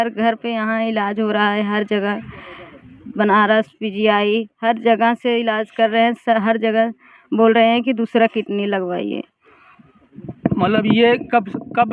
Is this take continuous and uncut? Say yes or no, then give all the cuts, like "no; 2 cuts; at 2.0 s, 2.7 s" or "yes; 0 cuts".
yes; 0 cuts